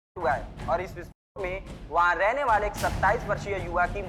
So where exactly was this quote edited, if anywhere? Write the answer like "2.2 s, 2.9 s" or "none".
none